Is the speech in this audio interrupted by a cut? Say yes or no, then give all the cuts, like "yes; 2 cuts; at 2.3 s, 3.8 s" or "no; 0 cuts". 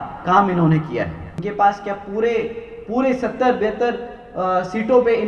yes; 1 cut; at 1.4 s